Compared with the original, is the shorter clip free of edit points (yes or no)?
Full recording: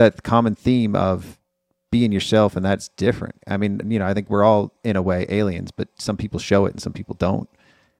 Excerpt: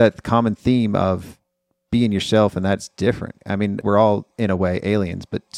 no